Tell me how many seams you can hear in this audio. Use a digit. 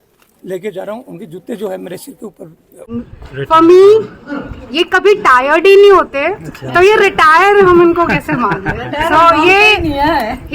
1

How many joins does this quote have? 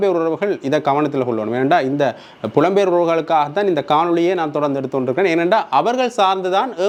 0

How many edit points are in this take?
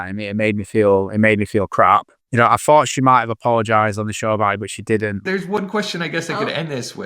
2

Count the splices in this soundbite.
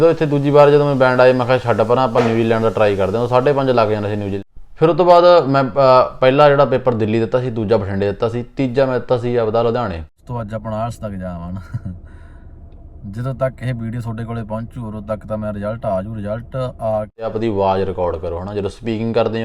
3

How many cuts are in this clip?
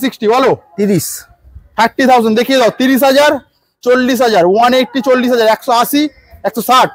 0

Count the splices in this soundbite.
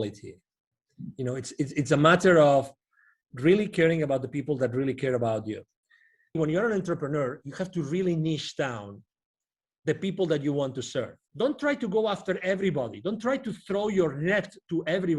2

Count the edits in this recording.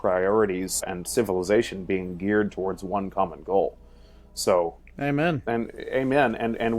1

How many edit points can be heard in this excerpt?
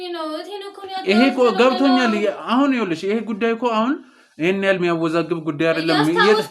0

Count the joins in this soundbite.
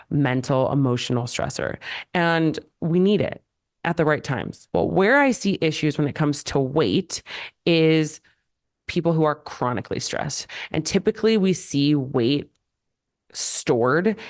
1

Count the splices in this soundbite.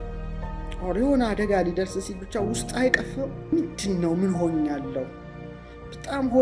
1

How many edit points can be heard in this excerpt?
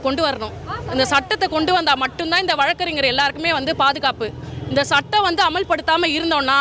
0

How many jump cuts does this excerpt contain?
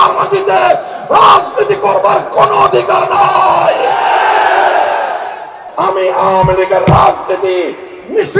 1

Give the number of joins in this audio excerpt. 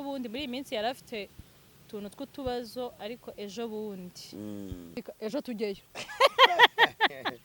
1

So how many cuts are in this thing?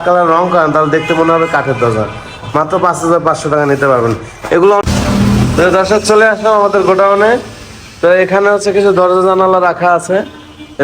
1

